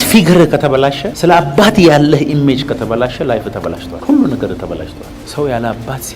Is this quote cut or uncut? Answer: cut